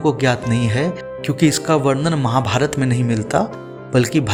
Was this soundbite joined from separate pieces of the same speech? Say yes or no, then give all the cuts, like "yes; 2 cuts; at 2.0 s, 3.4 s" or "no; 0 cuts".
no; 0 cuts